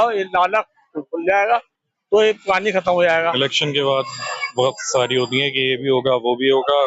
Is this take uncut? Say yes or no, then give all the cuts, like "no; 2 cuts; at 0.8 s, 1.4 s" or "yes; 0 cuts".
no; 1 cut; at 3.6 s